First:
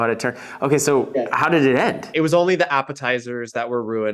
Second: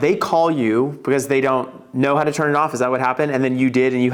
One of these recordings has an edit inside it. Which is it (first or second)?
first